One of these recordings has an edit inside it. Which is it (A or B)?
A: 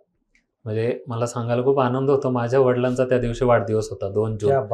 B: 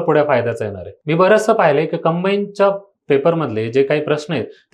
B